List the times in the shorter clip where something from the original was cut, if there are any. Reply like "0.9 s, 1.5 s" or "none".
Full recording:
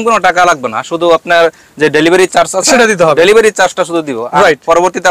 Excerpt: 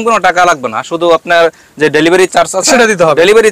none